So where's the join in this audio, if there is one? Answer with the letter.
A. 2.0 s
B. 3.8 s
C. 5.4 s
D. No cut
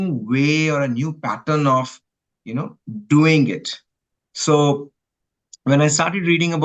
D